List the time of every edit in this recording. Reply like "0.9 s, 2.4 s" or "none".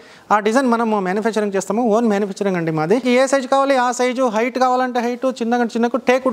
3.0 s